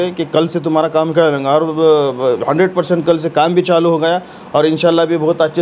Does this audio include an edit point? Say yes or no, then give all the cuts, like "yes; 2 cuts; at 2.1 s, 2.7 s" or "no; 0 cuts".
no; 0 cuts